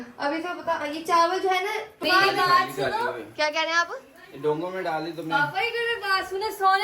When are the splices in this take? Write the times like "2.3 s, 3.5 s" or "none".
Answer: 1.9 s